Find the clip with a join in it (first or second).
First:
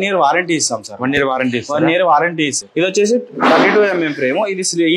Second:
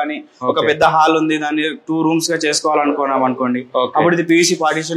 first